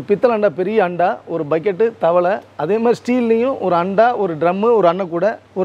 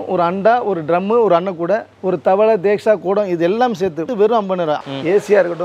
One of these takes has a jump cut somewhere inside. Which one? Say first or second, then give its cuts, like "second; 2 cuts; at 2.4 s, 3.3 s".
second; 2 cuts; at 4.1 s, 4.8 s